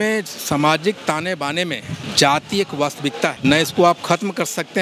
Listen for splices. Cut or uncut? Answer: cut